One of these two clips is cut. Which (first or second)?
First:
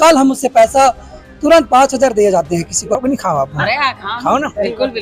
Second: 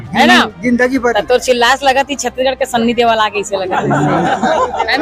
first